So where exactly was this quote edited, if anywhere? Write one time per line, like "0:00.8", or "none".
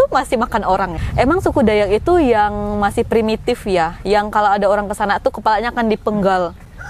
0:00.9